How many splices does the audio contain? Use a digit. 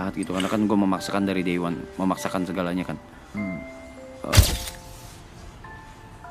1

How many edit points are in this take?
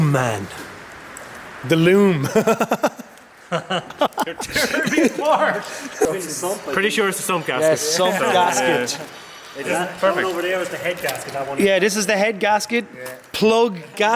1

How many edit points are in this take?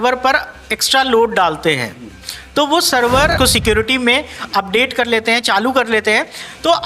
1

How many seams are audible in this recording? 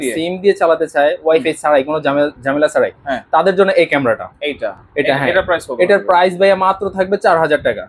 0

